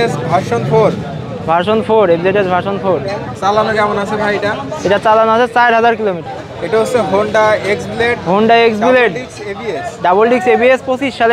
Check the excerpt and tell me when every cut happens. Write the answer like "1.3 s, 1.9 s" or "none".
6.2 s